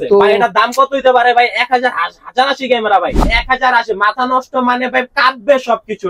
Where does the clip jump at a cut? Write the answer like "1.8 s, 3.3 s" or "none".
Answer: 3.2 s

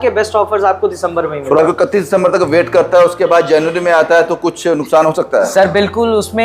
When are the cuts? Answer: 1.6 s

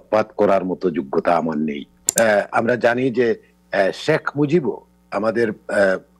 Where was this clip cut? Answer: 2.0 s

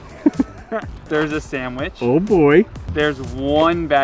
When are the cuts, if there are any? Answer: 0.9 s, 2.8 s

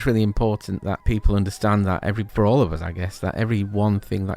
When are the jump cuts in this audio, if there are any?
1.0 s, 2.2 s

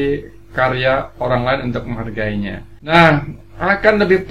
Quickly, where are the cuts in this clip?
2.9 s

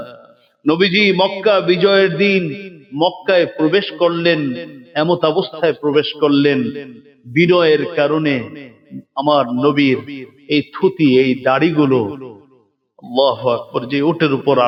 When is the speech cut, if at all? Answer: none

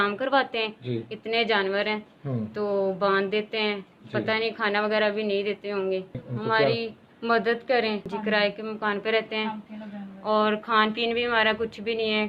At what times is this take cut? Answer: 6.2 s, 8.1 s

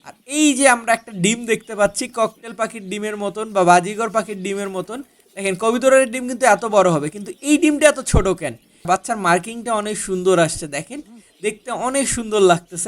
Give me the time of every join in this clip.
8.9 s

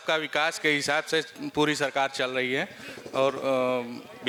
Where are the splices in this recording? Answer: none

